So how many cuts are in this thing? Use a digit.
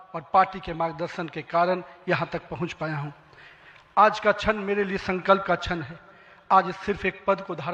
0